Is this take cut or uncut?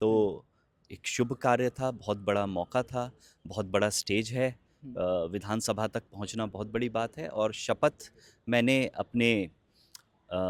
uncut